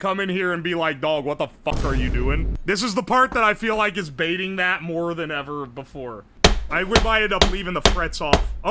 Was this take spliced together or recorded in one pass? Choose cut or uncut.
cut